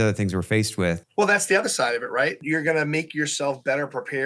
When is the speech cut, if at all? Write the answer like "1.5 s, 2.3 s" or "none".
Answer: 1.1 s, 2.4 s